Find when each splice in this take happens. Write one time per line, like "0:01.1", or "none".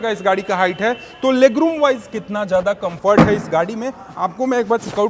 none

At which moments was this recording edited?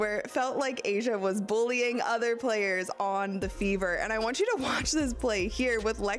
none

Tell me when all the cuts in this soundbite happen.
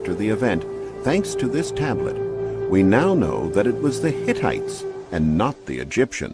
0:01.8

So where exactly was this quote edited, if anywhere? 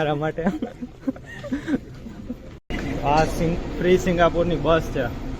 0:02.6

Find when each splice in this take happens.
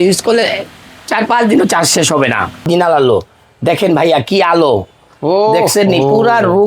0:02.7

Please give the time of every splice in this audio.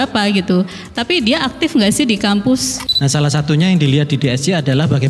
0:02.7

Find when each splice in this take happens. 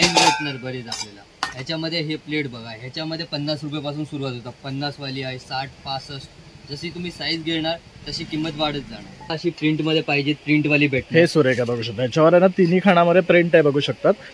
0:09.3

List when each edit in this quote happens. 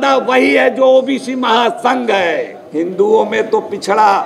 0:02.6

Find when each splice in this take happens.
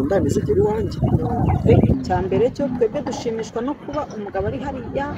0:01.9

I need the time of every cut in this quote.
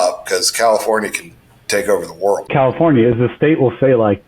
0:02.5

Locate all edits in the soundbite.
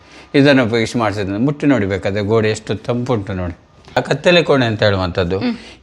0:04.0

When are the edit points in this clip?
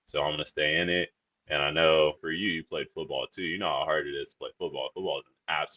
none

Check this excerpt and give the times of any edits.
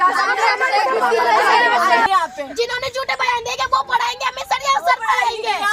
0:02.1

